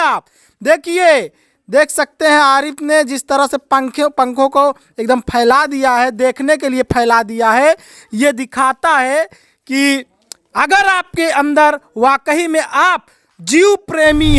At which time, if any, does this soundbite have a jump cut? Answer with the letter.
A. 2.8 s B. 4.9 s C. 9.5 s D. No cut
D